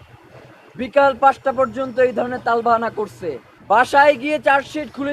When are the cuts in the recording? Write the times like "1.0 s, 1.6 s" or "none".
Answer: 3.5 s